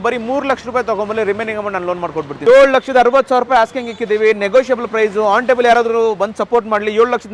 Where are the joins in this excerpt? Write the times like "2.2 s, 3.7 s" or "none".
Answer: 2.3 s

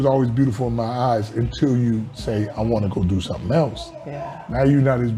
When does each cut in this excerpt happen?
none

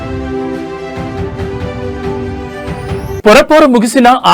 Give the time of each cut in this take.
2.7 s

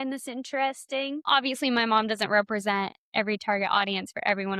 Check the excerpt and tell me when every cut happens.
1.2 s

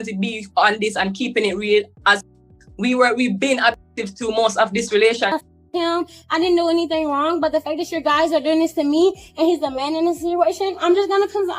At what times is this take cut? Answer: 5.4 s

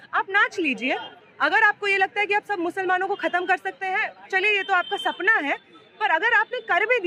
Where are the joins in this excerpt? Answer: none

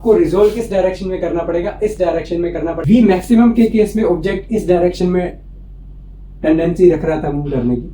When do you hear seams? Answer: 2.8 s

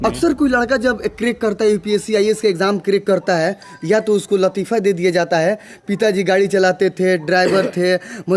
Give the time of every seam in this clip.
none

